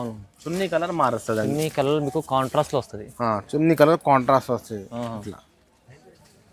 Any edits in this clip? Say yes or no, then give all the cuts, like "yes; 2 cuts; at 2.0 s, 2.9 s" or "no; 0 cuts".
no; 0 cuts